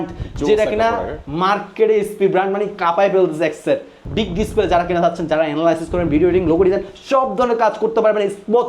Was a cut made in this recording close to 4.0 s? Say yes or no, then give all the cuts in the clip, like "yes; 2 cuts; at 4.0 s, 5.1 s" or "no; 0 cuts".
yes; 1 cut; at 4.0 s